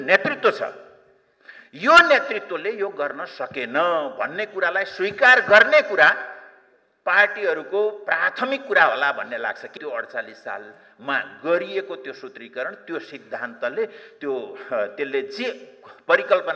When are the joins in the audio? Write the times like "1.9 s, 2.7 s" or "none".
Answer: 9.8 s